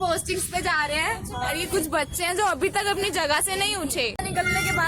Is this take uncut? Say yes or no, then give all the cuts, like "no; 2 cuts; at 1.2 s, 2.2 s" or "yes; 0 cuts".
yes; 0 cuts